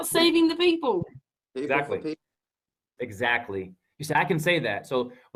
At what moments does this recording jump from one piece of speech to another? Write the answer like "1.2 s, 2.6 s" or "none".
none